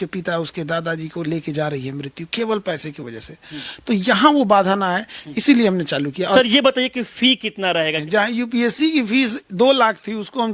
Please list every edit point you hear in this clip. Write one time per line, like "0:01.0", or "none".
0:06.4
0:08.0